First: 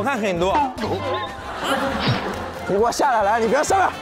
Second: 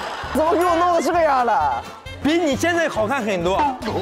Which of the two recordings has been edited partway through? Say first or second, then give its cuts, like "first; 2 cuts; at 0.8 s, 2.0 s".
second; 1 cut; at 2.1 s